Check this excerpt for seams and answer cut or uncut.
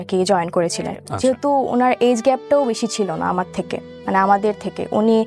cut